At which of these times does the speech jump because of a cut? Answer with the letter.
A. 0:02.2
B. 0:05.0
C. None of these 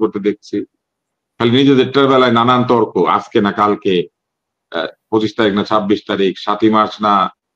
C